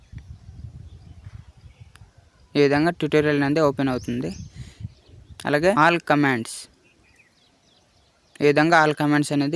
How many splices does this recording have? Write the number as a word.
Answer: zero